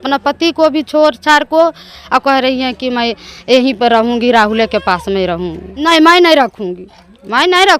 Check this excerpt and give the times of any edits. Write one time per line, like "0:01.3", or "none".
0:01.9
0:05.9